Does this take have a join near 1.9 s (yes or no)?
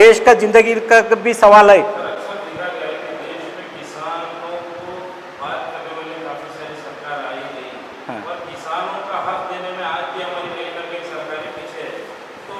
no